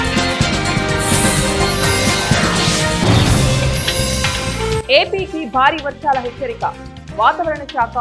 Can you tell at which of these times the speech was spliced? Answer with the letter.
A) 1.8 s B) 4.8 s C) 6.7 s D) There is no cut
B